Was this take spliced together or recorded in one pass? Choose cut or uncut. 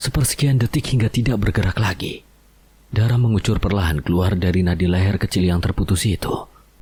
uncut